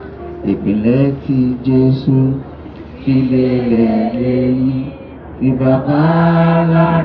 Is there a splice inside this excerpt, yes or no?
no